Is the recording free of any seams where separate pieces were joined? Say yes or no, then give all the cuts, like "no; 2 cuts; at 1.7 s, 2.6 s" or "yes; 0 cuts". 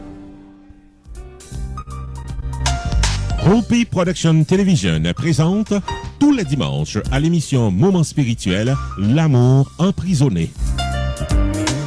no; 1 cut; at 1.2 s